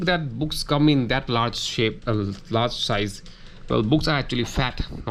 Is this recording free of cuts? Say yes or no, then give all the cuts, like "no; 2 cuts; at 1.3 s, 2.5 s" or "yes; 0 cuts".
yes; 0 cuts